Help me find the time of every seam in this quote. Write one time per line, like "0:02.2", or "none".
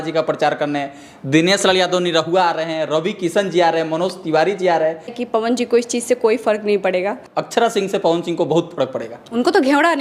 0:05.2
0:07.2